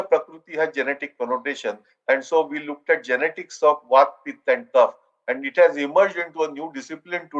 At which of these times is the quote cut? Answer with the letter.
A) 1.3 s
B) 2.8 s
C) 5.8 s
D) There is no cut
D